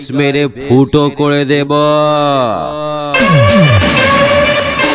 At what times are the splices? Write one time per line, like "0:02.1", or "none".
none